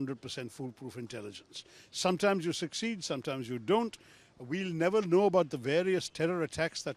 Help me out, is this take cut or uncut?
uncut